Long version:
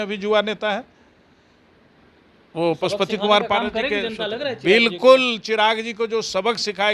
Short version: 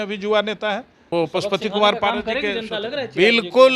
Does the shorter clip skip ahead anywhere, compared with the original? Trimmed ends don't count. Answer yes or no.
yes